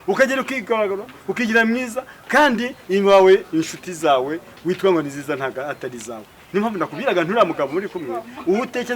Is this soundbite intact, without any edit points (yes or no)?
yes